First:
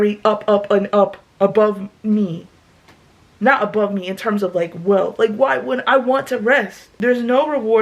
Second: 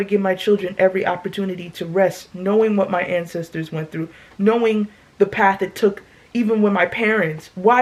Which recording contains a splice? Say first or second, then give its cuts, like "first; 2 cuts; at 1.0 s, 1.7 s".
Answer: first; 1 cut; at 6.8 s